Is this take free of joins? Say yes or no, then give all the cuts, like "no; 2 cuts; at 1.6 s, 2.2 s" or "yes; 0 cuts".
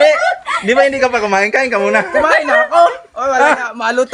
yes; 0 cuts